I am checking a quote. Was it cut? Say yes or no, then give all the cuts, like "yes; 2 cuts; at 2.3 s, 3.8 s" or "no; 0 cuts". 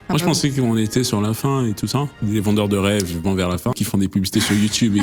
yes; 2 cuts; at 2.2 s, 3.7 s